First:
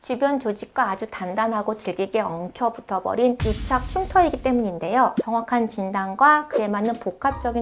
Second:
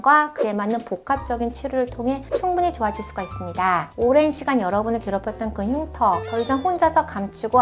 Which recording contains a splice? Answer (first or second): first